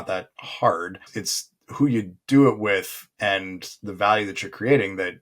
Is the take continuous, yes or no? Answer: no